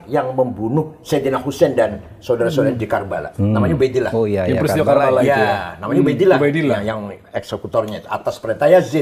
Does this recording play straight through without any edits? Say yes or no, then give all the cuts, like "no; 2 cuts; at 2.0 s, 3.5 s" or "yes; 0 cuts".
yes; 0 cuts